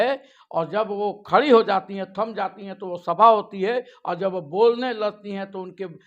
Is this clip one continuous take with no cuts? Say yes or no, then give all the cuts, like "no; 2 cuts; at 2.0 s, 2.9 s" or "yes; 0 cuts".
yes; 0 cuts